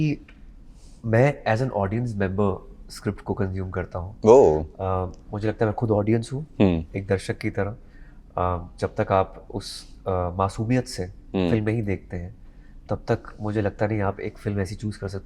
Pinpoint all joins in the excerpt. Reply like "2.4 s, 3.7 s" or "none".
none